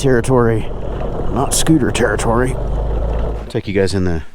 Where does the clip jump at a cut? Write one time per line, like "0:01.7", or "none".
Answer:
0:03.3